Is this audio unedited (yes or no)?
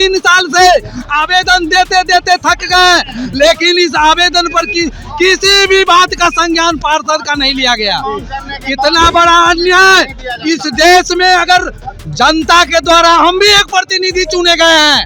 yes